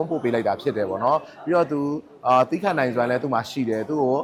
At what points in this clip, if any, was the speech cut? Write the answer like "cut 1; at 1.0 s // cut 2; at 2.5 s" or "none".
none